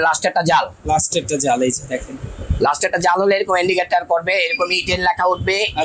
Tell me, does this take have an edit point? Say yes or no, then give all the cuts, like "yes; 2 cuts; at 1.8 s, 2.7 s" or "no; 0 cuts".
no; 0 cuts